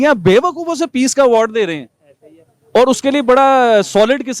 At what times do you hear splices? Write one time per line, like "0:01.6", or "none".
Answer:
none